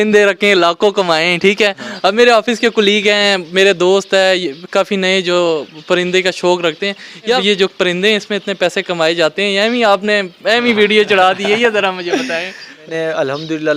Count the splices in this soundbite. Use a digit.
2